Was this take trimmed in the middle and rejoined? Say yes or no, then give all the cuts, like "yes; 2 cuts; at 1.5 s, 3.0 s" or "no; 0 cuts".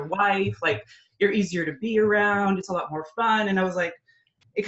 no; 0 cuts